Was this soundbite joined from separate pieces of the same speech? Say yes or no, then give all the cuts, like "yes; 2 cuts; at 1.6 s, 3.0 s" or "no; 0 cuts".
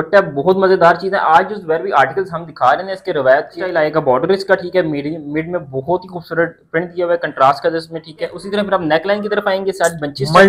yes; 2 cuts; at 3.7 s, 8.4 s